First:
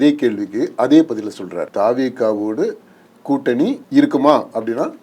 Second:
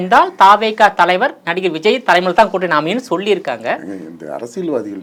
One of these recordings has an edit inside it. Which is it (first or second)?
first